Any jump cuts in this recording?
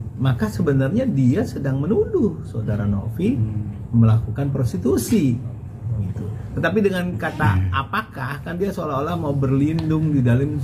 no; 0 cuts

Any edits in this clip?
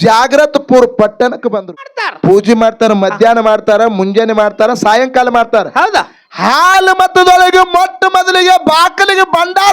yes; 1 cut; at 1.9 s

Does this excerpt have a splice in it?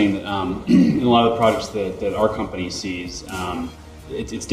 no; 0 cuts

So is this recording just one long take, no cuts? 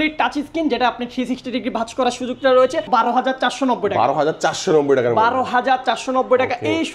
no; 1 cut; at 2.9 s

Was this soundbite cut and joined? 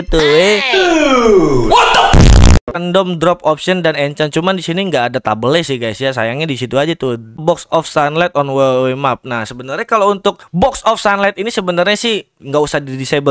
yes; 2 cuts; at 2.7 s, 7.4 s

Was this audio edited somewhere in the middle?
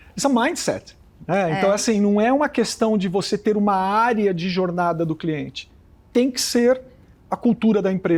no; 0 cuts

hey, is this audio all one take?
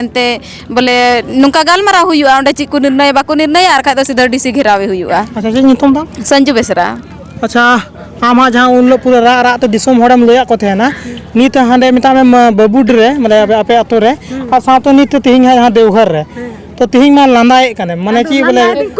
yes; 0 cuts

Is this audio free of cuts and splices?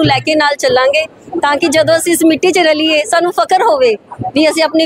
yes; 0 cuts

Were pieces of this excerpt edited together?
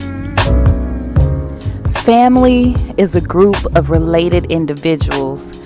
yes; 1 cut; at 1.0 s

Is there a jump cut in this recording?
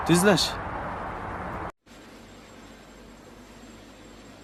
no; 0 cuts

